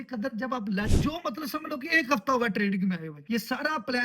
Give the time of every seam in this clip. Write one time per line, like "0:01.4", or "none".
0:00.9
0:03.1